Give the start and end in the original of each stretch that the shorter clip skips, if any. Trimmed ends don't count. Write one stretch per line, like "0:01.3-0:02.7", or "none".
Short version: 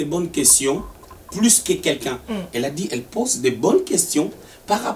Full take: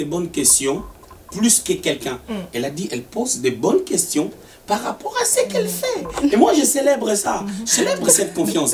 none